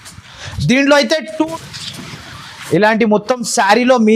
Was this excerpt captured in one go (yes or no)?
no